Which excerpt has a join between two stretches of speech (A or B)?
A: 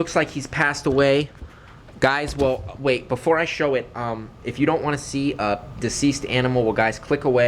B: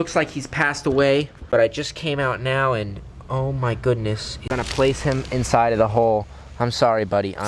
B